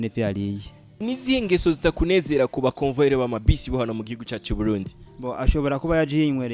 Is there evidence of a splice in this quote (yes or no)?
yes